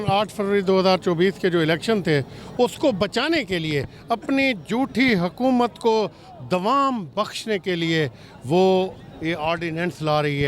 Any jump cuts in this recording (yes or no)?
no